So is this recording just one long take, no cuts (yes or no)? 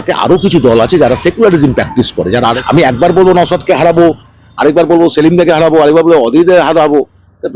no